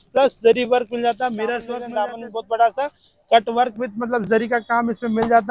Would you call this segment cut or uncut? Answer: cut